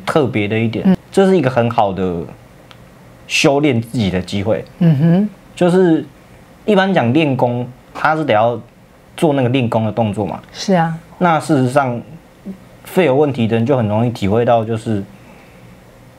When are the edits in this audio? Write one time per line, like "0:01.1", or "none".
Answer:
0:01.0